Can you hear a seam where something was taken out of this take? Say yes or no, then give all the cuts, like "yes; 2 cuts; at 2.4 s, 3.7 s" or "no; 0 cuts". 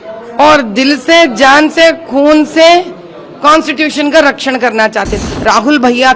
yes; 1 cut; at 5.2 s